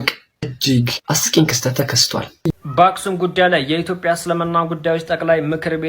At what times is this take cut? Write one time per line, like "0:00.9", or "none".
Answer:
0:02.4

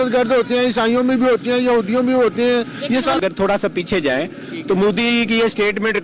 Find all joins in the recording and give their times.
0:03.2

